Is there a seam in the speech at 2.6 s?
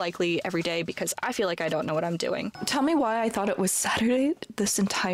yes; 1 cut; at 2.6 s

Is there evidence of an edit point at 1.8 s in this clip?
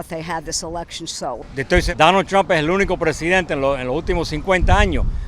yes; 1 cut; at 1.8 s

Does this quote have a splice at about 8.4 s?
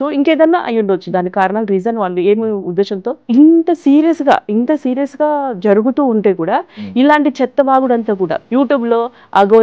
yes; 2 cuts; at 3.2 s, 8.4 s

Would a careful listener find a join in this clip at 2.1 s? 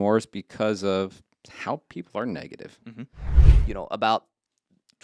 no; 1 cut; at 3.3 s

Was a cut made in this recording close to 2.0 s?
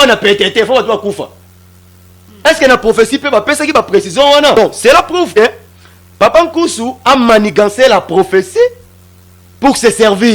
no; 1 cut; at 4.6 s

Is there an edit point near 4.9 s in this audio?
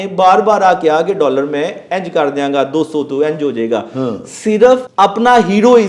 yes; 1 cut; at 4.9 s

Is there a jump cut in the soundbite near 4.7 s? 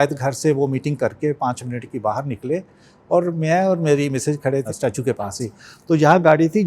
yes; 1 cut; at 4.7 s

